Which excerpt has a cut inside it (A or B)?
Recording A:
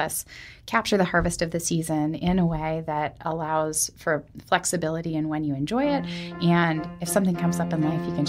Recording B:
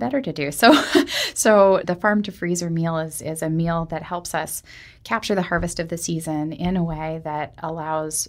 B